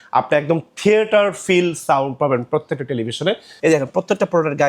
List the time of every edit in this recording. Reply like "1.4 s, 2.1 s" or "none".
3.5 s